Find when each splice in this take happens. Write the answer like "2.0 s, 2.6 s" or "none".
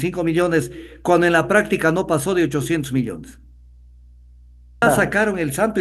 4.8 s